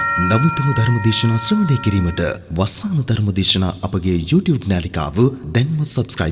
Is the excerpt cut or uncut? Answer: uncut